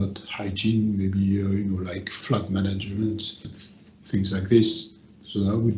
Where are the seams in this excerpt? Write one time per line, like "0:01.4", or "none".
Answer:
0:02.2
0:03.4